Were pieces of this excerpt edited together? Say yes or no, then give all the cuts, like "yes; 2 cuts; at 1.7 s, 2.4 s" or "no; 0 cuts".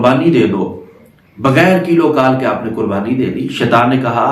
no; 0 cuts